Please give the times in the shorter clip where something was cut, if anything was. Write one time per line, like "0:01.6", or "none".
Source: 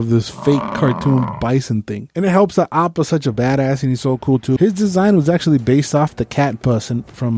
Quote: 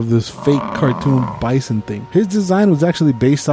0:02.1